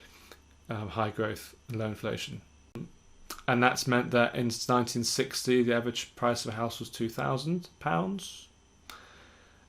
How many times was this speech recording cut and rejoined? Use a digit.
1